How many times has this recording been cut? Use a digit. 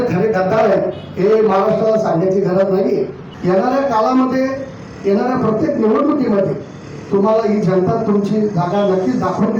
1